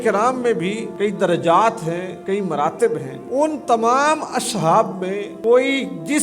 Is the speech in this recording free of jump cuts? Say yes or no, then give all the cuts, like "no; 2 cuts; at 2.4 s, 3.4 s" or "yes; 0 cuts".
no; 4 cuts; at 0.9 s, 2.1 s, 3.1 s, 5.3 s